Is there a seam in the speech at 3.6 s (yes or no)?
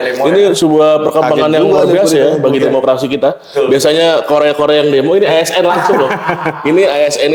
no